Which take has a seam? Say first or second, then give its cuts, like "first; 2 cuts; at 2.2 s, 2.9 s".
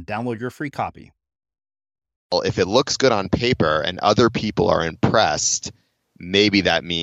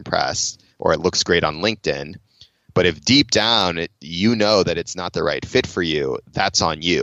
first; 1 cut; at 2.3 s